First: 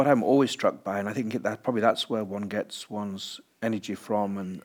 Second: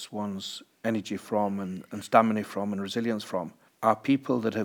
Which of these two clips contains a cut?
second; 1 cut; at 3.6 s

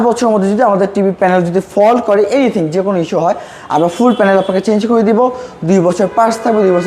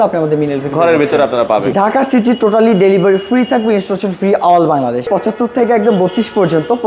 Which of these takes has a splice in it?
second; 2 cuts; at 1.7 s, 5.1 s

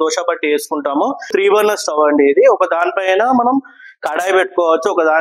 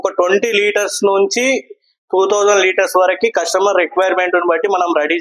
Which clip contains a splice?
first; 1 cut; at 1.3 s

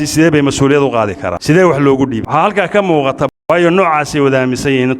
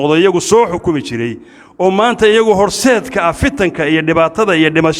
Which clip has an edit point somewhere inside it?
first; 3 cuts; at 1.3 s, 2.2 s, 3.3 s

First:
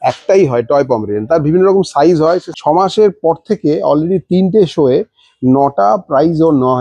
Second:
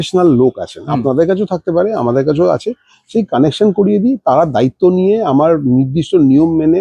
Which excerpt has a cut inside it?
first; 1 cut; at 2.5 s

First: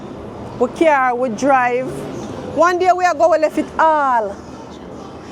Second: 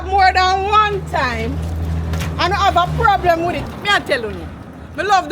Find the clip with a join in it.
second; 1 cut; at 3.7 s

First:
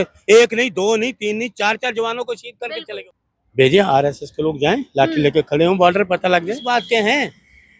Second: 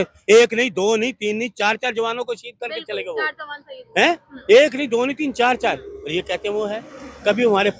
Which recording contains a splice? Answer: first; 2 cuts; at 3.0 s, 6.7 s

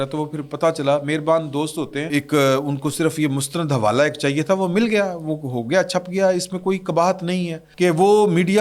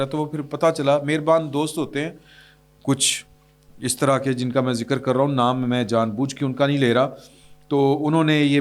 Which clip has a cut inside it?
first; 2 cuts; at 2.1 s, 7.6 s

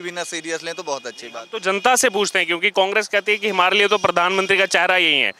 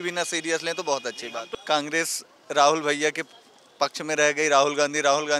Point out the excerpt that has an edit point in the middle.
second; 1 cut; at 1.5 s

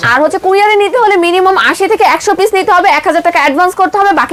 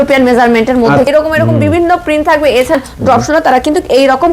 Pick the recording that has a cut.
second; 2 cuts; at 1.1 s, 2.7 s

